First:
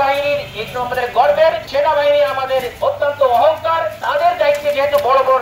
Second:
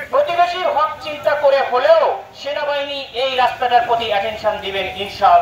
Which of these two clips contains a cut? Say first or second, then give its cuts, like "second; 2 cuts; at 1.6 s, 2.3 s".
first; 3 cuts; at 1.6 s, 2.7 s, 4.0 s